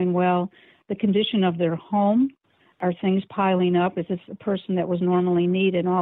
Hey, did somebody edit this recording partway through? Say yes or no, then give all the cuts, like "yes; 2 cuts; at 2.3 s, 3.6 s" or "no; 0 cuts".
yes; 1 cut; at 2.7 s